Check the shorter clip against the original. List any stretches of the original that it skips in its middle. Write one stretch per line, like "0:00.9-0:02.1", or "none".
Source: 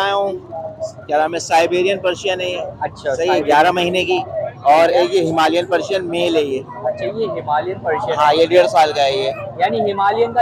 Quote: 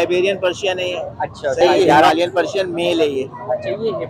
0:03.7-0:05.4